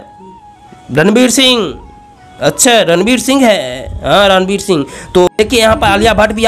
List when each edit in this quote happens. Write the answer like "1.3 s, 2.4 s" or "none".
5.3 s

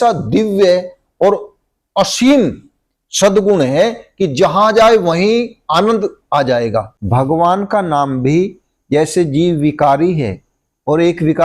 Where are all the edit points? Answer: 7.0 s

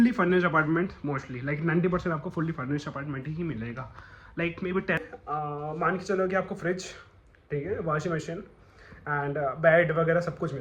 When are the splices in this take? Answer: 5.0 s

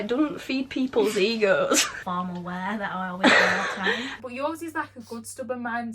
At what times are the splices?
1.9 s, 4.1 s

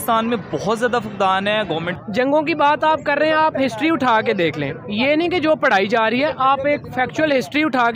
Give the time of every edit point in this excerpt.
1.9 s

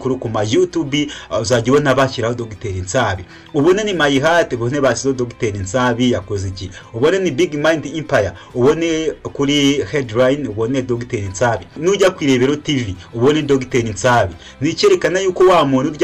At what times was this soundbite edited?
none

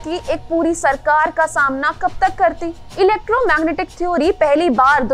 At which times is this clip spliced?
2.8 s

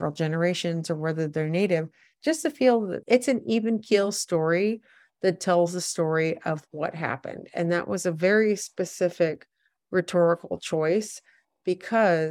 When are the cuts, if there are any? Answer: 3.0 s

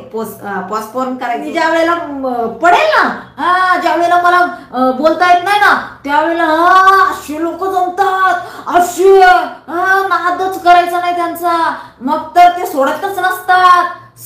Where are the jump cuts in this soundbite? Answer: 1.4 s

